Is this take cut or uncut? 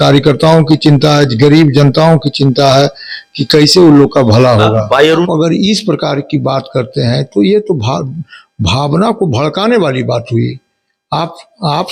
cut